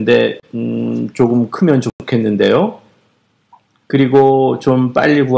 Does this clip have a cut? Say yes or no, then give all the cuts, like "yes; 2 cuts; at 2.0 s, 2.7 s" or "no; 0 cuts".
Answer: no; 0 cuts